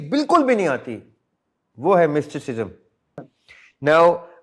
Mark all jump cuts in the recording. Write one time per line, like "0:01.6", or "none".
0:03.2